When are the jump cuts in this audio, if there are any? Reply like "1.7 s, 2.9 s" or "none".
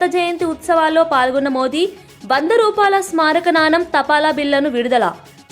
none